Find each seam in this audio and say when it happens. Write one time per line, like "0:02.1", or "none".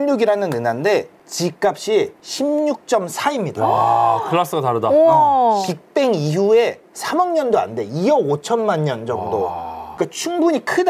0:05.6
0:09.9